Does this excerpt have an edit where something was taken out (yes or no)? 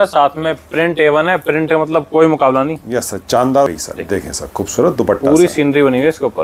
yes